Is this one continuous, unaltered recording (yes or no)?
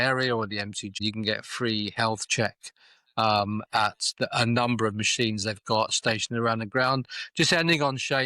no